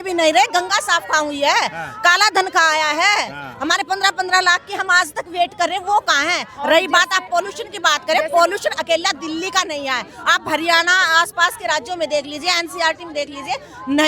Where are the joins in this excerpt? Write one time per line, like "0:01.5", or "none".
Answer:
none